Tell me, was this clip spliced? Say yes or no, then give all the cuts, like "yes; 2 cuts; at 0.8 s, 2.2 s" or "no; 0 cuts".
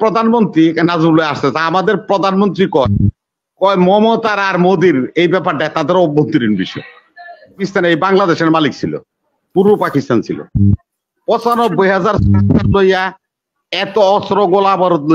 yes; 1 cut; at 7.6 s